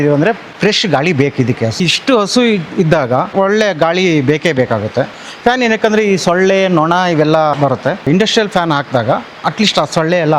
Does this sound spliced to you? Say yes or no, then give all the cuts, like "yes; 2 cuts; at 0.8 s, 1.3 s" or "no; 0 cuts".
yes; 4 cuts; at 1.8 s, 3.3 s, 5.2 s, 8.1 s